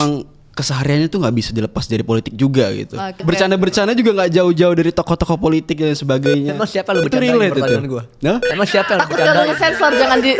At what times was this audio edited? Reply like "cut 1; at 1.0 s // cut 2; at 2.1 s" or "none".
cut 1; at 3.2 s